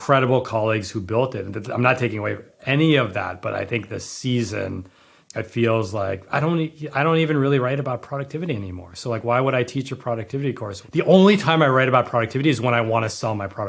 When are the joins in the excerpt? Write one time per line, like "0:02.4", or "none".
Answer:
0:05.2
0:10.8